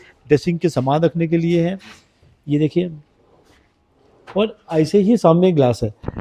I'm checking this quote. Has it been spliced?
no; 0 cuts

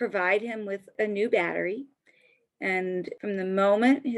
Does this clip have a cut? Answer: yes; 2 cuts; at 0.9 s, 3.1 s

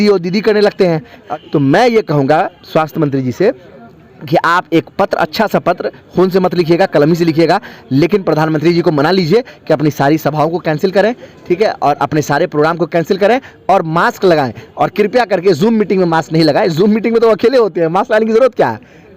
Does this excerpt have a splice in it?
yes; 1 cut; at 1.2 s

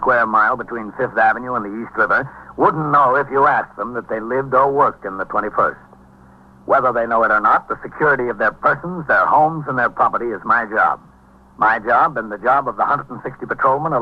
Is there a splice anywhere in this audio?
yes; 1 cut; at 5.6 s

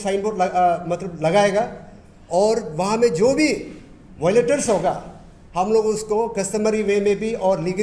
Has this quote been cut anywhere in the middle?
no; 0 cuts

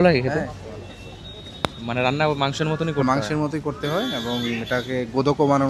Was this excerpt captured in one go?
yes; 0 cuts

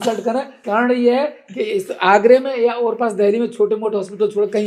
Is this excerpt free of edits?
yes; 0 cuts

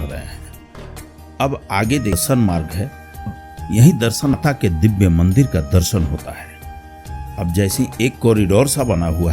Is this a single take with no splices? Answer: no; 3 cuts; at 2.2 s, 3.3 s, 4.3 s

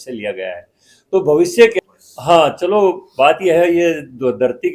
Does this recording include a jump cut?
yes; 1 cut; at 1.8 s

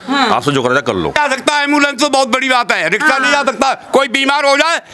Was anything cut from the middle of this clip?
yes; 1 cut; at 1.1 s

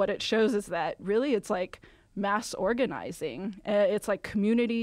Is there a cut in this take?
no; 0 cuts

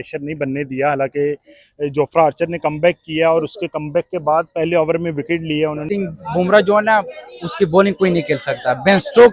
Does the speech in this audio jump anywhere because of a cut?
yes; 1 cut; at 5.9 s

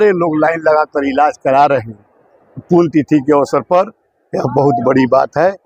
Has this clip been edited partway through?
no; 0 cuts

